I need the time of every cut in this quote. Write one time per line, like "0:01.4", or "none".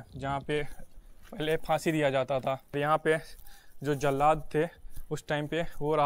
0:02.8

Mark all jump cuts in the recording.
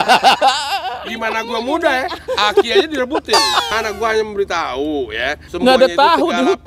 0:03.6
0:05.4

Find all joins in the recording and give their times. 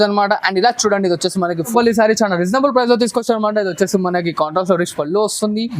0:01.7

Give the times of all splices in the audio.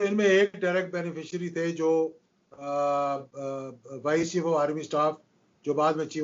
none

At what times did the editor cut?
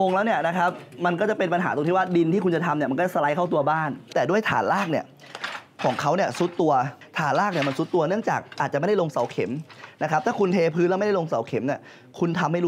0:04.1
0:07.0

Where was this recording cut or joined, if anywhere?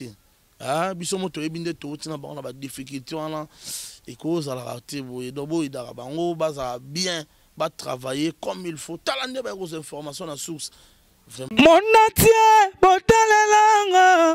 0:11.5

